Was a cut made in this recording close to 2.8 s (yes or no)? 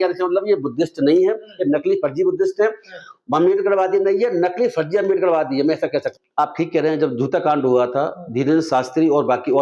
no